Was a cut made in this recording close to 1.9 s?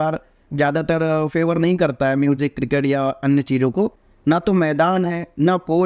no; 1 cut; at 4.1 s

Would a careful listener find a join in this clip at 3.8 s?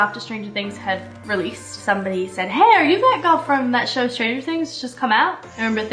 no; 1 cut; at 1.8 s

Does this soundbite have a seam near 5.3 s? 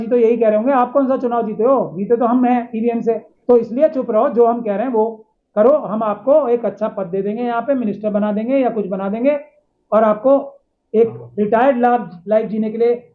no; 1 cut; at 3.3 s

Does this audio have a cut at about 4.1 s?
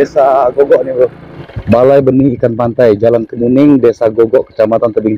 no; 1 cut; at 1.3 s

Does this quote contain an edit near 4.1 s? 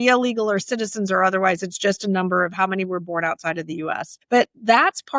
yes; 1 cut; at 4.1 s

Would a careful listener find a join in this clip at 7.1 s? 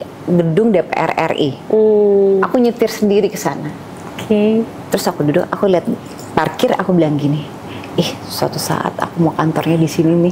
no; 0 cuts

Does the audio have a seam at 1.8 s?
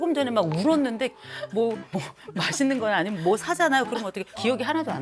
no; 0 cuts

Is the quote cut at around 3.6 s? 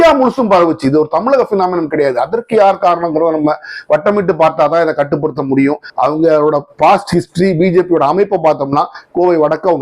no; 1 cut; at 5.9 s

